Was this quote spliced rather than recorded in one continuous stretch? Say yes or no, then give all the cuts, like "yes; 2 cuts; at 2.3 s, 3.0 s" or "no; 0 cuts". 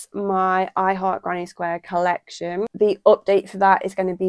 yes; 1 cut; at 2.7 s